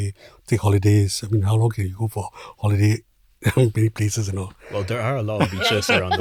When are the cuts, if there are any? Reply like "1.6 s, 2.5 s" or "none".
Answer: none